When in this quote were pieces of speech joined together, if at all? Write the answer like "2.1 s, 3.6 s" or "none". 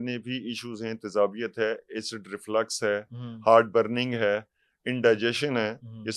none